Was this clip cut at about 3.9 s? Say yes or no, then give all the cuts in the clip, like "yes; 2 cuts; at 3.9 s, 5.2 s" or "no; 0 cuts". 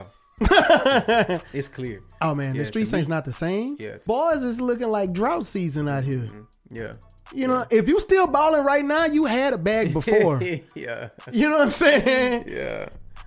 yes; 1 cut; at 3.9 s